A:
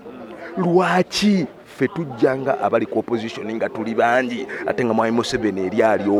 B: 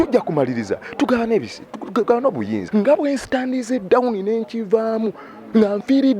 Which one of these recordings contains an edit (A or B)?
B